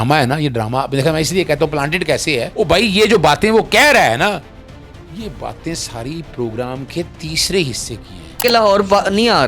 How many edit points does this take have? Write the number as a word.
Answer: two